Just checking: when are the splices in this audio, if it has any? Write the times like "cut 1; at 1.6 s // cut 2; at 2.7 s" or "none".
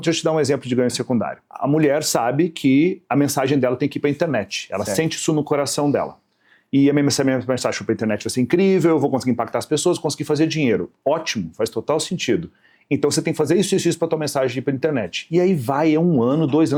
none